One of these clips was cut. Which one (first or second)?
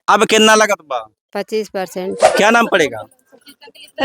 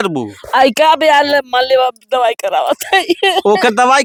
first